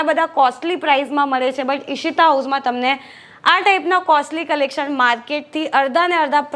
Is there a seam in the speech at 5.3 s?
no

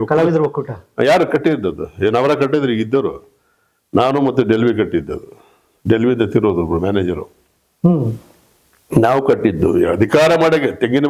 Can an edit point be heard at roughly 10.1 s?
no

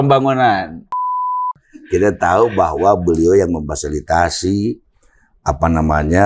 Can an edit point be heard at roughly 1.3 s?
yes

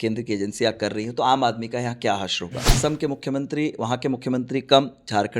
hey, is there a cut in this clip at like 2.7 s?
yes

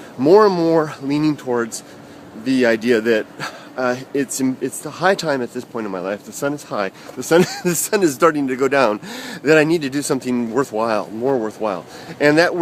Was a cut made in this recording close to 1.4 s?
yes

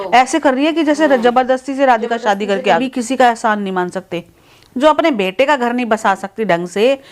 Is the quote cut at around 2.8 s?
yes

